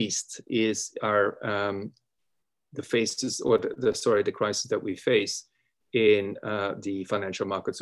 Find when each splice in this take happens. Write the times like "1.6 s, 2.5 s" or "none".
none

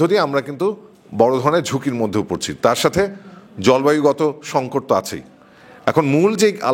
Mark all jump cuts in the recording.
none

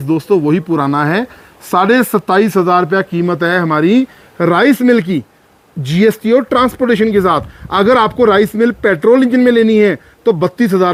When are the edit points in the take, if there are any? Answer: none

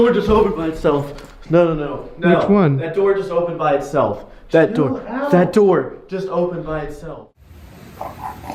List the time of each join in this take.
7.0 s

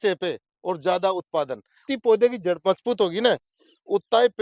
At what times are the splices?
1.7 s

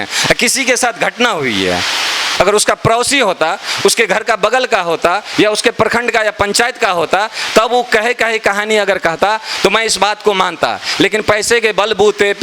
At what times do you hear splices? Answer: 2.2 s

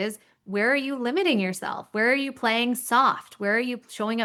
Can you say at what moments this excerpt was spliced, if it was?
none

